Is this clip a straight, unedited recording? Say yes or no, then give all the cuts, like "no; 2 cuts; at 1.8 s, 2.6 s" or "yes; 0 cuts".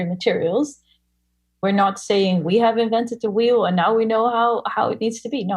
no; 1 cut; at 1.4 s